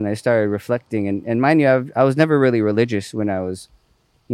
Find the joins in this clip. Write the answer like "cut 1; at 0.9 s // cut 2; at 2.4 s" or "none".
none